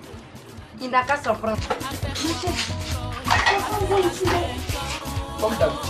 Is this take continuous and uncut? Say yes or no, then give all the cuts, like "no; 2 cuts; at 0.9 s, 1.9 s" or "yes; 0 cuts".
yes; 0 cuts